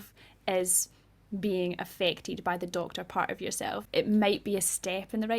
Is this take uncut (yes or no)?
no